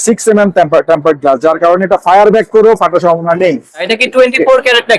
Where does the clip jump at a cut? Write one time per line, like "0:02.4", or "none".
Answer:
0:03.8